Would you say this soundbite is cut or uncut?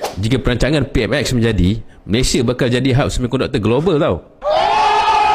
uncut